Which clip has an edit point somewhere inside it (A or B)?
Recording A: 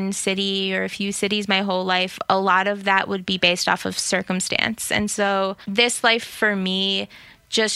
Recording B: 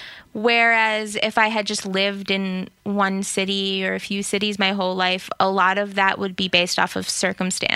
A